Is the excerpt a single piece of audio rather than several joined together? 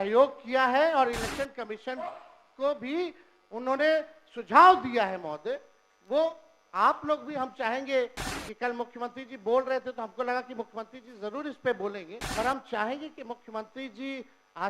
no; 1 cut; at 12.1 s

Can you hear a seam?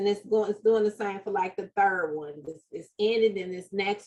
no; 0 cuts

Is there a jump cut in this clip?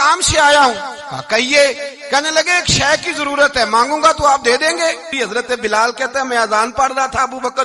yes; 1 cut; at 5.1 s

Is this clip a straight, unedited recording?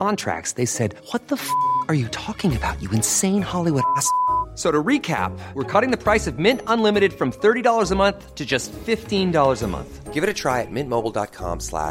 yes; 0 cuts

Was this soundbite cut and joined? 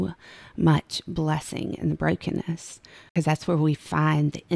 yes; 1 cut; at 3.1 s

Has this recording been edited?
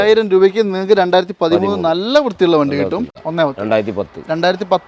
yes; 1 cut; at 3.2 s

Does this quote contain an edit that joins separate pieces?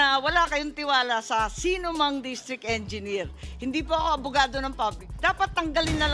yes; 1 cut; at 5.1 s

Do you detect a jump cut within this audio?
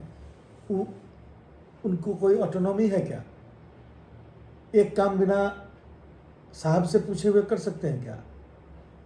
no; 0 cuts

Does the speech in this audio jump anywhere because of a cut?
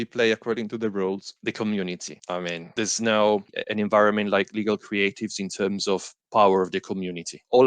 yes; 1 cut; at 3.5 s

